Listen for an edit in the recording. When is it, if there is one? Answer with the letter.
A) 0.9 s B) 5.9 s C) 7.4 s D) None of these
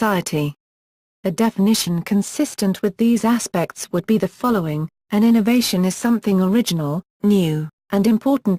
C